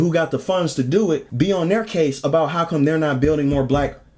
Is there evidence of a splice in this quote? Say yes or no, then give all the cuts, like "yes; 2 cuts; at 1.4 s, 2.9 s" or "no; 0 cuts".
yes; 1 cut; at 1.3 s